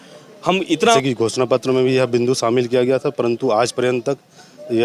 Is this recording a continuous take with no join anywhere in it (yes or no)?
no